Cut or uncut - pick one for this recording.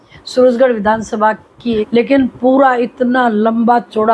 cut